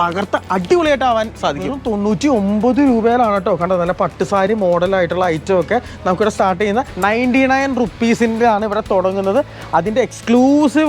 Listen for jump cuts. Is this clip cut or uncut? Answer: cut